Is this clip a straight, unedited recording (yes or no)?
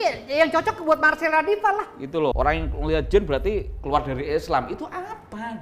no